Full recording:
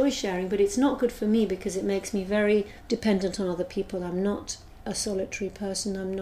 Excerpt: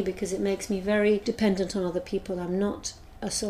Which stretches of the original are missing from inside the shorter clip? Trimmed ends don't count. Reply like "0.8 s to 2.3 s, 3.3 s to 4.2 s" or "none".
2.7 s to 2.9 s